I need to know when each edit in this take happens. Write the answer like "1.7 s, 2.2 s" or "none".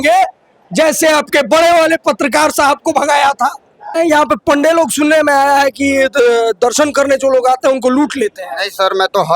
3.9 s